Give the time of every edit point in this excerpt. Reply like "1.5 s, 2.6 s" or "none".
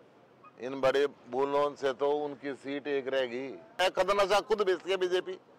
3.8 s